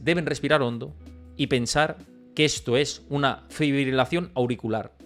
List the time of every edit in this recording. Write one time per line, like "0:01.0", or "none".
none

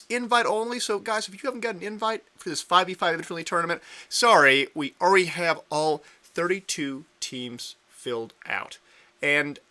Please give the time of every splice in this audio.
0:06.5

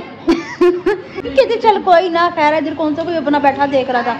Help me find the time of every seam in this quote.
0:01.1

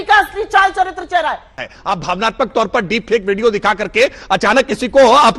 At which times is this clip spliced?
0:01.6

